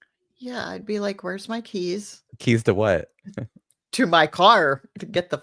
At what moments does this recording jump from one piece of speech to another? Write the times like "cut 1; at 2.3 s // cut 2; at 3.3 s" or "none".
cut 1; at 2.3 s